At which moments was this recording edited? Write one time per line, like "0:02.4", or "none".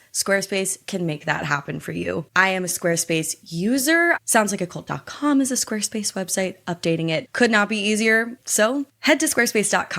0:04.2
0:08.4